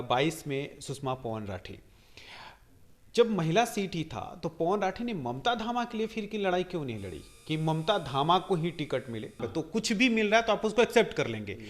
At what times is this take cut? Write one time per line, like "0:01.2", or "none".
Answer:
0:09.4